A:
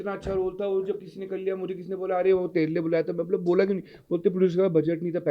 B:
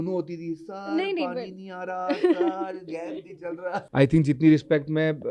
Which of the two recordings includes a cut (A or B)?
B